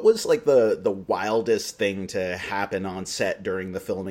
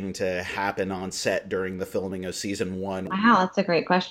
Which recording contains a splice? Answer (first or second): second